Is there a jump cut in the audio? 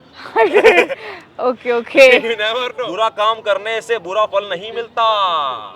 yes; 1 cut; at 2.7 s

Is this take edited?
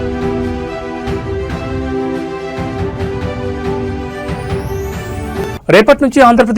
yes; 1 cut; at 5.2 s

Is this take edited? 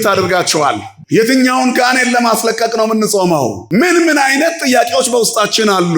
yes; 2 cuts; at 0.9 s, 3.6 s

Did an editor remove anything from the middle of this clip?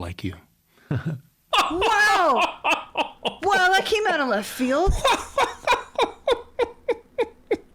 yes; 1 cut; at 1.3 s

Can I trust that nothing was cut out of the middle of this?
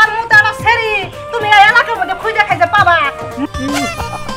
no; 1 cut; at 3.4 s

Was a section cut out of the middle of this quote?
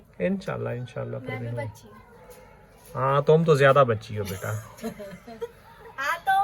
no; 0 cuts

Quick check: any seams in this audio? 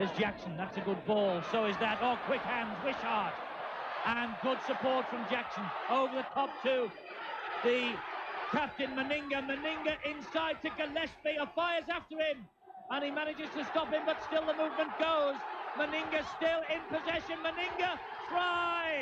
no; 0 cuts

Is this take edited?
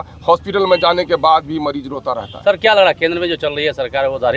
no; 0 cuts

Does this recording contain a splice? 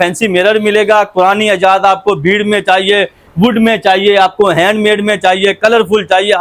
no; 0 cuts

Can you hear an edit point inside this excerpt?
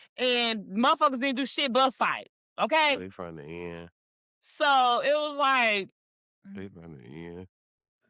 no; 0 cuts

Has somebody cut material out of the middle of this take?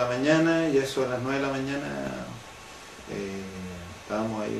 yes; 1 cut; at 1.0 s

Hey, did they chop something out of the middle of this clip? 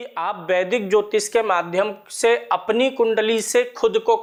no; 0 cuts

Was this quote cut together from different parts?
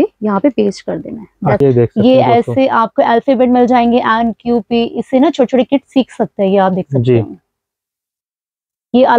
yes; 1 cut; at 1.6 s

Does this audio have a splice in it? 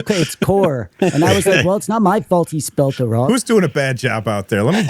yes; 1 cut; at 3.2 s

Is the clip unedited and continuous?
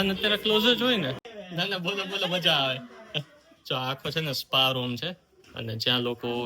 no; 1 cut; at 1.2 s

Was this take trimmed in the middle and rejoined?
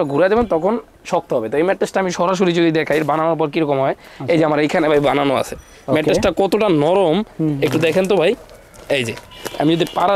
no; 0 cuts

